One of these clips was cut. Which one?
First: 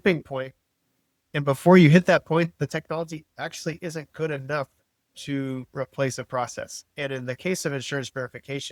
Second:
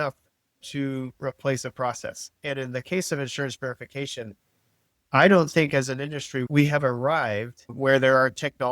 second; 1 cut; at 6.5 s

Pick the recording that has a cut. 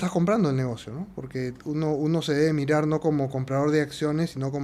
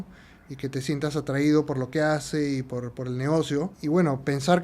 second; 1 cut; at 3.8 s

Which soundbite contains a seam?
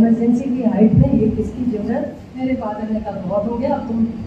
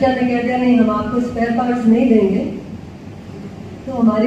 first; 1 cut; at 2.2 s

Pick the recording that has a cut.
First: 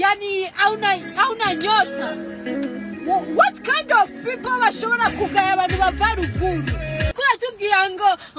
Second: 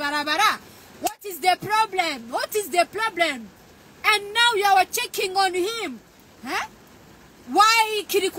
first; 1 cut; at 7.1 s

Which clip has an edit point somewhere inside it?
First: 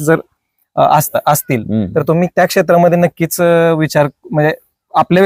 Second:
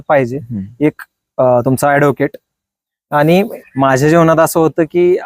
second; 1 cut; at 3.5 s

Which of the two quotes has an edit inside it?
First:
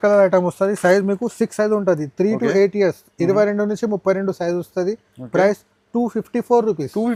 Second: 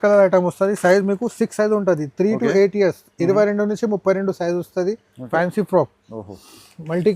second; 1 cut; at 5.2 s

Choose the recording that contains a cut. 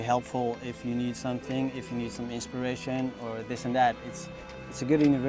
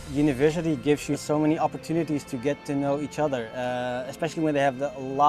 second; 1 cut; at 4.3 s

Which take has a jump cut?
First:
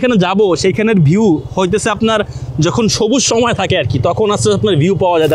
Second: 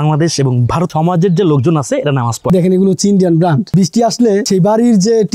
second; 4 cuts; at 0.9 s, 2.4 s, 3.7 s, 4.4 s

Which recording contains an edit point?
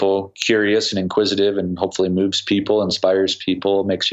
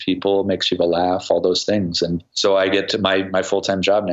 second; 1 cut; at 2.2 s

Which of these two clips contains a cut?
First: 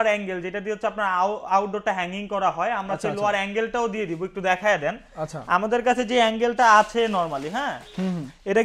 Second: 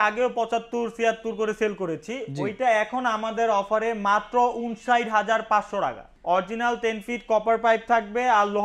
second; 1 cut; at 6.1 s

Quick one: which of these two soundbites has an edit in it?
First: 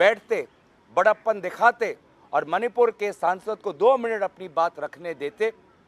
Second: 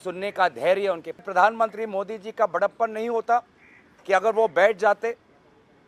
second; 1 cut; at 1.2 s

